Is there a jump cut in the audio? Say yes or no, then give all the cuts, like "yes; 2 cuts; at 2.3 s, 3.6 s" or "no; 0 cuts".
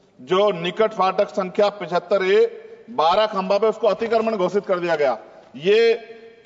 no; 0 cuts